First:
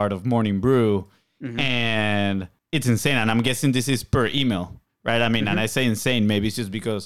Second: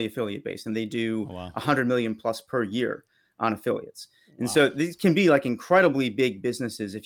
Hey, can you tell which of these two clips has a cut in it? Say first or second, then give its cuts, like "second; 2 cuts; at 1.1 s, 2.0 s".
first; 1 cut; at 2.6 s